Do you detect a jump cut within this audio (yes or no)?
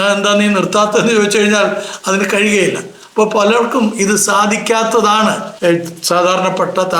yes